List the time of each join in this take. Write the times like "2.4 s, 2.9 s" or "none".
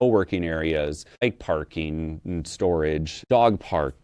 1.2 s, 3.1 s